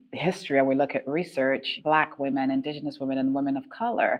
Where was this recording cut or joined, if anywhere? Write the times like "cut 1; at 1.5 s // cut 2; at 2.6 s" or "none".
cut 1; at 1.7 s